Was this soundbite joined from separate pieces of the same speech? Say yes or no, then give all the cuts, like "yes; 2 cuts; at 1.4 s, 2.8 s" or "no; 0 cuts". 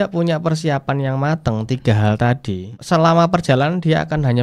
yes; 1 cut; at 2.7 s